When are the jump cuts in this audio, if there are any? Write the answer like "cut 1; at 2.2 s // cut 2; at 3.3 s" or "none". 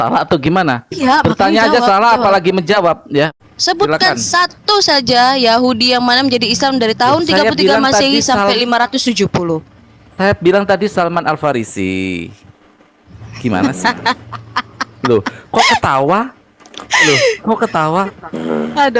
cut 1; at 3.3 s